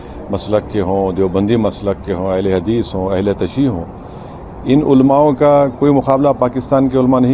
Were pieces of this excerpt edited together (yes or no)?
no